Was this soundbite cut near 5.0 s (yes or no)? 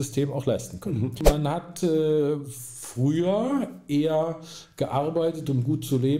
no